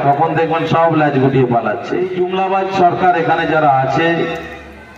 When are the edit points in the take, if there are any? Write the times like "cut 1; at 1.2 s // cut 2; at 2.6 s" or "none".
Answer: cut 1; at 2.0 s